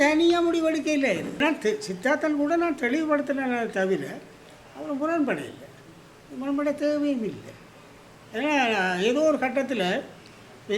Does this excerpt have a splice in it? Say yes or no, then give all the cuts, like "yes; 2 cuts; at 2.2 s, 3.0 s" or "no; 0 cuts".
yes; 1 cut; at 1.4 s